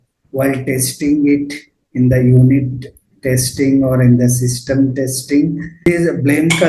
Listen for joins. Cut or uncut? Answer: cut